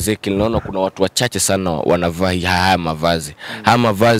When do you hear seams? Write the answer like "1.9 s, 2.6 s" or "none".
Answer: none